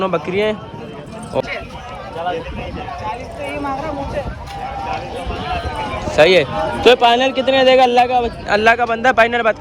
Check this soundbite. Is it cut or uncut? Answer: cut